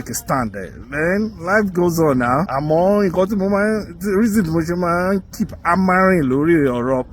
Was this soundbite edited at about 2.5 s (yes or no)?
yes